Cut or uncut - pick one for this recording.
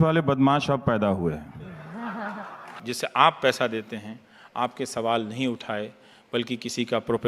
cut